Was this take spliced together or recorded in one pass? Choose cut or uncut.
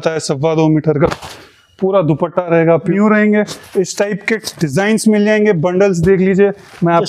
cut